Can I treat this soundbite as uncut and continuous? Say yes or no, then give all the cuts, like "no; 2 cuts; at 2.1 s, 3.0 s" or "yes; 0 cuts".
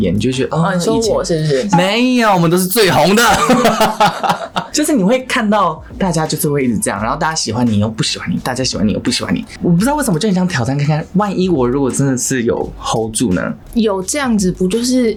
yes; 0 cuts